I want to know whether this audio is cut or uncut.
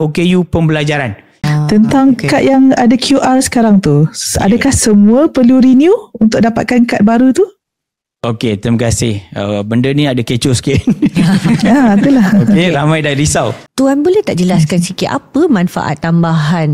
cut